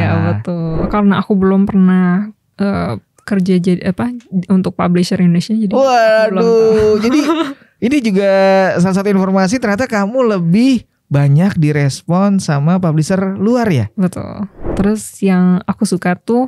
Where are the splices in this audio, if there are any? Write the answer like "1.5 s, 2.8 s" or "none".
0.9 s, 14.7 s

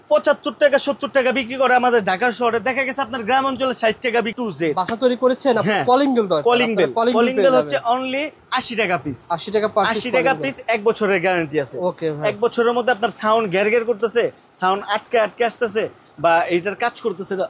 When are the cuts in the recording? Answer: 4.4 s

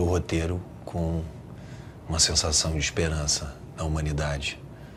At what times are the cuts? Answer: none

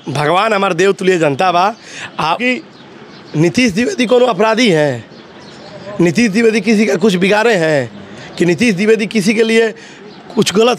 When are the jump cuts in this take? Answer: 2.4 s

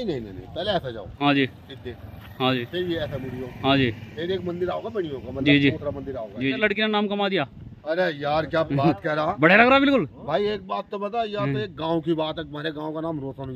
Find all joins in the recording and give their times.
6.6 s

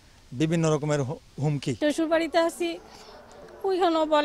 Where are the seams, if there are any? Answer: 1.7 s

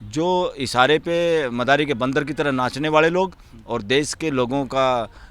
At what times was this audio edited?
none

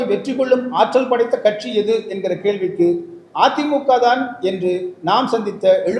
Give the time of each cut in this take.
none

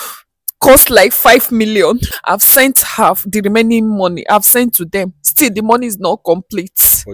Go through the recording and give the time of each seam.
2.1 s

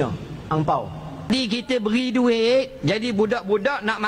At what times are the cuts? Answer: 1.2 s

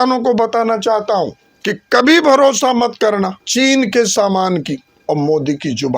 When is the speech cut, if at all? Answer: 1.5 s, 3.4 s, 4.9 s

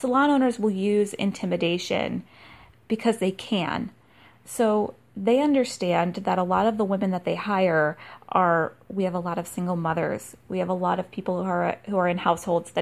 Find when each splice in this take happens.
none

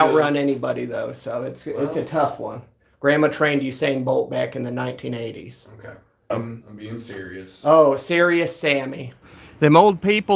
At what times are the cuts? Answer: 6.3 s, 9.2 s

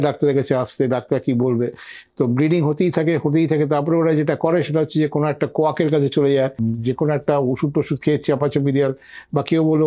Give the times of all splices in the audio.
6.6 s

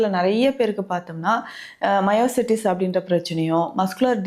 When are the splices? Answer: none

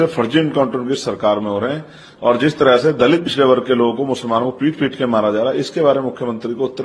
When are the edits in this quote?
none

